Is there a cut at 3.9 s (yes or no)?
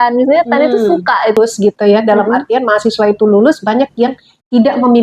no